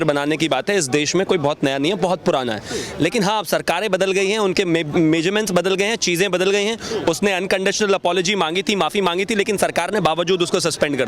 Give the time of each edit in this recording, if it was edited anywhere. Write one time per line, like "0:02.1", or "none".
none